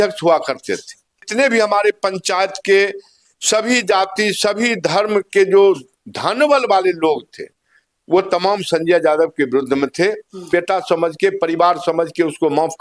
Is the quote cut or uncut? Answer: cut